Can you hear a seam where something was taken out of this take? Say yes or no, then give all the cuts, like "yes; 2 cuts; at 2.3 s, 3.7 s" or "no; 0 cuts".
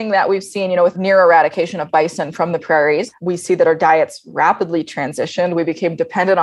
yes; 2 cuts; at 0.9 s, 3.1 s